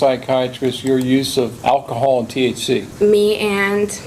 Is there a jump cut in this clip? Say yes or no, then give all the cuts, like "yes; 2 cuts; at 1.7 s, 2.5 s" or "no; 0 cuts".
yes; 2 cuts; at 1.6 s, 2.9 s